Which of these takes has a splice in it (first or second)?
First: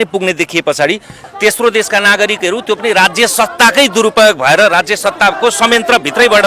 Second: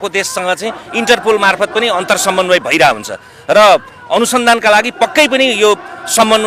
first